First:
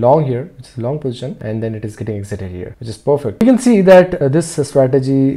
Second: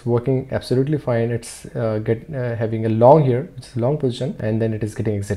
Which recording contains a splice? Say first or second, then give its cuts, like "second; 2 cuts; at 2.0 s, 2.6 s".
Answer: first; 2 cuts; at 3.3 s, 4.2 s